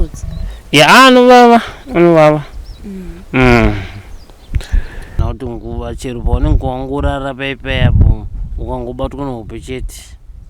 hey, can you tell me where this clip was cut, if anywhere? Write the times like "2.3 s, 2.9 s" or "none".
5.2 s